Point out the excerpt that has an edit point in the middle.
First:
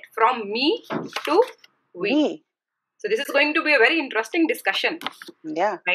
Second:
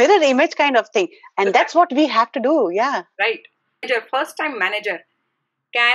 second; 1 cut; at 3.8 s

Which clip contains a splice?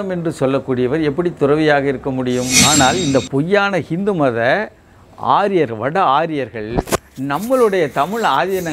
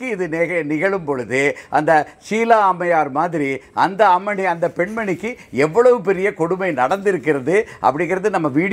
first; 1 cut; at 2.6 s

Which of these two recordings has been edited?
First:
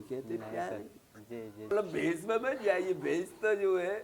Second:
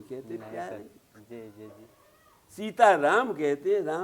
first; 1 cut; at 1.7 s

